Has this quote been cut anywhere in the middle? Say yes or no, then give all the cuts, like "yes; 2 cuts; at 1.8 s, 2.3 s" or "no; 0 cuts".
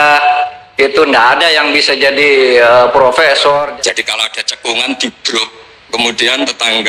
yes; 1 cut; at 3.7 s